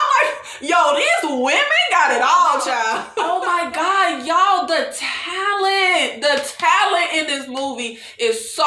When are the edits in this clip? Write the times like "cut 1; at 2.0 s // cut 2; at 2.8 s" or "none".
cut 1; at 3.1 s

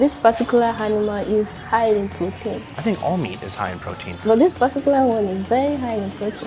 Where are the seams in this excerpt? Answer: cut 1; at 2.7 s // cut 2; at 4.1 s

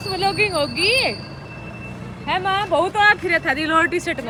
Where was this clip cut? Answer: none

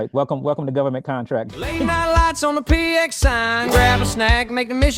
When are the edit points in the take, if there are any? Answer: cut 1; at 1.8 s

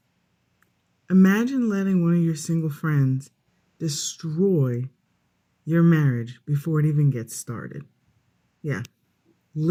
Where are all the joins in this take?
none

